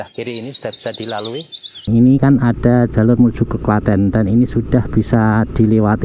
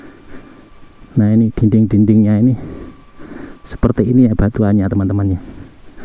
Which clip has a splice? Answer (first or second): first